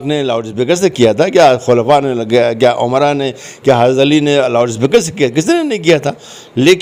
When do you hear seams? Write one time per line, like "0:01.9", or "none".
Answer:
none